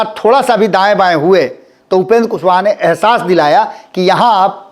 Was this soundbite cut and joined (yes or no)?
no